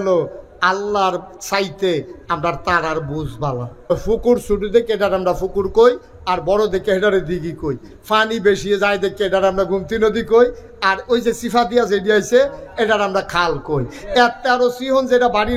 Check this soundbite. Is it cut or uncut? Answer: cut